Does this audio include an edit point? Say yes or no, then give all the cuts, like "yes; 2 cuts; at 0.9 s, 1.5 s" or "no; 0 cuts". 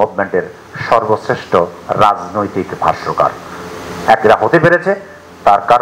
no; 0 cuts